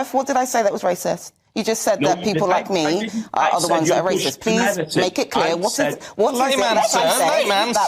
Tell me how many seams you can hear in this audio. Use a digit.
0